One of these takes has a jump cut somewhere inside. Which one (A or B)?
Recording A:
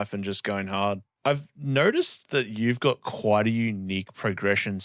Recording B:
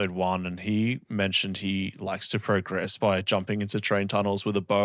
A